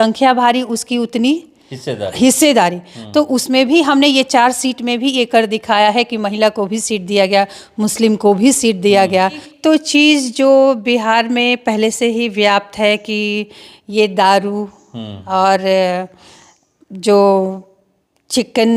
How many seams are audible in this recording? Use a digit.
1